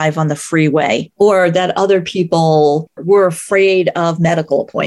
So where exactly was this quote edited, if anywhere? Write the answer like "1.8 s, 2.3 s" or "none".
1.1 s, 3.0 s